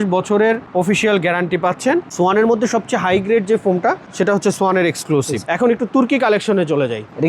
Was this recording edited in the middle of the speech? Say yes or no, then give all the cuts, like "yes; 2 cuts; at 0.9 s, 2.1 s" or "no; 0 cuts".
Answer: yes; 2 cuts; at 2.1 s, 5.4 s